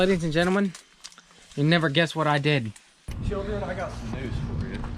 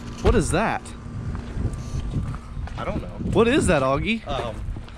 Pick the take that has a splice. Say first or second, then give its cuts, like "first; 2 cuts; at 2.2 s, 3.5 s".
first; 1 cut; at 3.1 s